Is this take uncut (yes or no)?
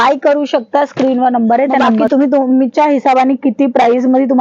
no